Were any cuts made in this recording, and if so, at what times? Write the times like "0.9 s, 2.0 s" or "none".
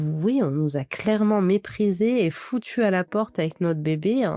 none